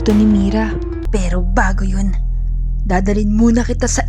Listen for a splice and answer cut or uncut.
cut